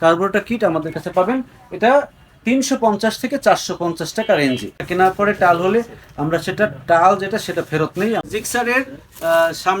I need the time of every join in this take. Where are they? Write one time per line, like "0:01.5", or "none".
0:04.8
0:08.2